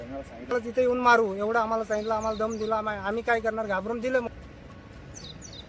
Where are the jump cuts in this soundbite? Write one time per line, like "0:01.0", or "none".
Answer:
0:04.2